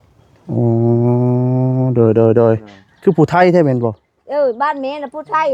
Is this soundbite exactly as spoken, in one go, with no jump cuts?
no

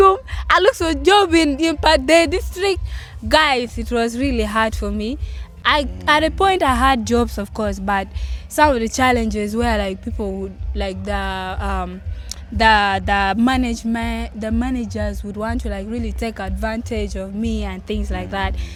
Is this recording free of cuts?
yes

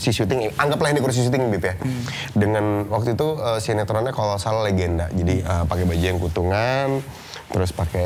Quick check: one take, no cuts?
yes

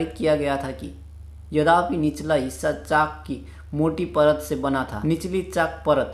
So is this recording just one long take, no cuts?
no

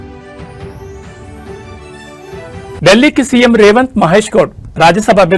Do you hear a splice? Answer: yes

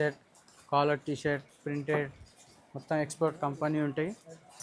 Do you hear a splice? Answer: no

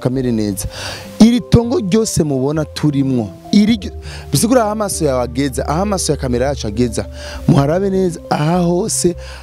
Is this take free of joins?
yes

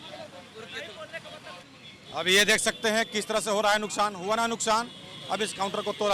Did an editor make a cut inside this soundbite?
yes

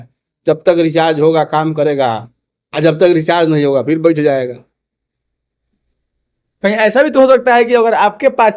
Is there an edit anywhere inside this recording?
no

